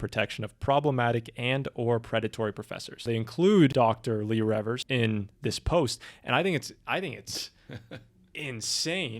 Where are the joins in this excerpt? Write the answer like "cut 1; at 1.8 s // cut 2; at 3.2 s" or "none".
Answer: cut 1; at 3.0 s // cut 2; at 3.7 s // cut 3; at 4.8 s